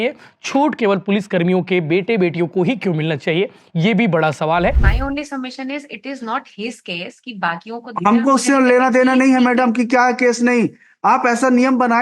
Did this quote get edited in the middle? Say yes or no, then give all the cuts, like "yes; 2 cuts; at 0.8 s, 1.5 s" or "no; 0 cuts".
yes; 1 cut; at 4.9 s